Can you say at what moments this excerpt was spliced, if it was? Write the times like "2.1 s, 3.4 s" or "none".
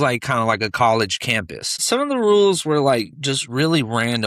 1.8 s